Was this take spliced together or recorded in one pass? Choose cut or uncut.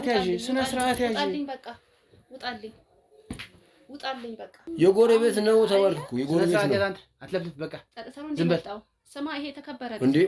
cut